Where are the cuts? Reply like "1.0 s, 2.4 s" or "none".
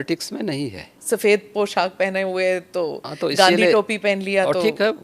1.0 s